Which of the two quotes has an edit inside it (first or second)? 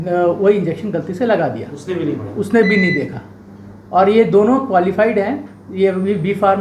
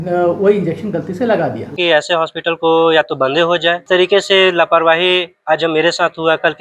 second